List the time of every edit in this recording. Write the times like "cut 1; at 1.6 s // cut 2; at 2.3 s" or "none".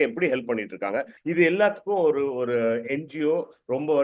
cut 1; at 1.1 s